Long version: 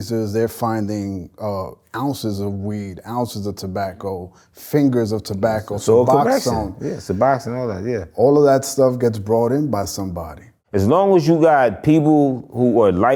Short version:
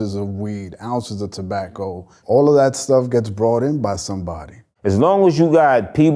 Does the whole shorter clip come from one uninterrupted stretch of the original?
no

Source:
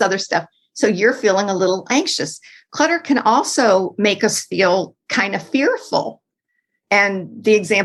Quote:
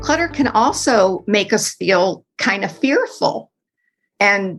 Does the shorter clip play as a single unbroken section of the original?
yes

